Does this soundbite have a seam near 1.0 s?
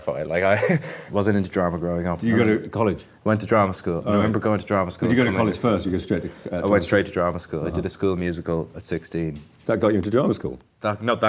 yes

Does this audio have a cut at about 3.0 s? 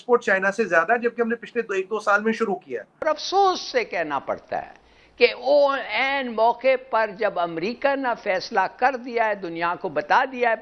yes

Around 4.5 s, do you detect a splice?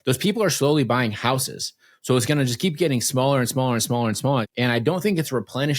yes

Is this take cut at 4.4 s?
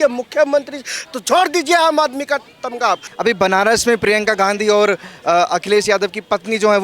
no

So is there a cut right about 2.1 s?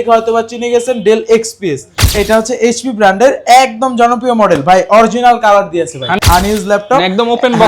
yes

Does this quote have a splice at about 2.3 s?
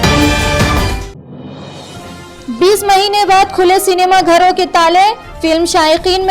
yes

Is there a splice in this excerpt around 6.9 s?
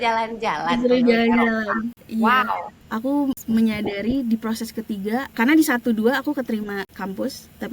yes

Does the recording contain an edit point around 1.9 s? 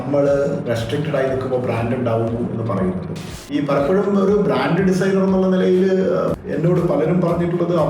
no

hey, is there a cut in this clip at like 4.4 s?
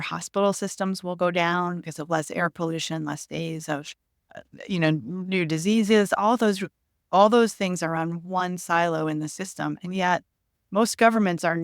yes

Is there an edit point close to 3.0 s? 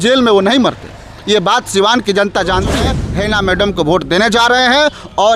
yes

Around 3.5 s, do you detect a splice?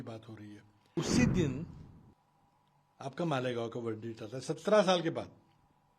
no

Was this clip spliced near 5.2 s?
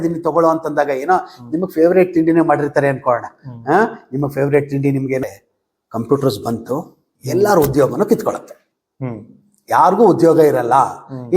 yes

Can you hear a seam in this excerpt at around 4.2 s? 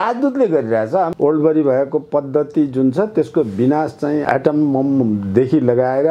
yes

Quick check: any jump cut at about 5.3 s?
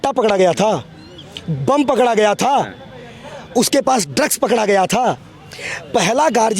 yes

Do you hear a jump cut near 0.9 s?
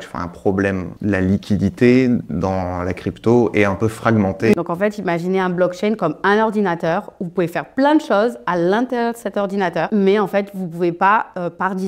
yes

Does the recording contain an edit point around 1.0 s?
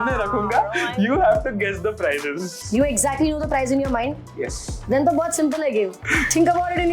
no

